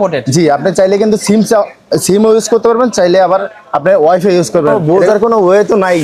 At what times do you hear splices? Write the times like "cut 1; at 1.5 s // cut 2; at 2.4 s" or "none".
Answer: cut 1; at 4.8 s